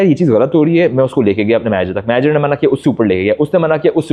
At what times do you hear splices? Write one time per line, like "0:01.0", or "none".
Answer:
none